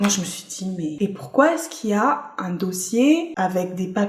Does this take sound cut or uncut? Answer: cut